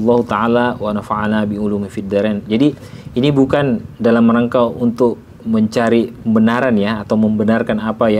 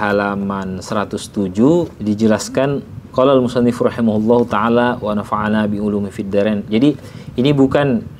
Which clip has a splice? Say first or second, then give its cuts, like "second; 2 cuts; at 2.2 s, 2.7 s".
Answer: second; 2 cuts; at 1.9 s, 3.0 s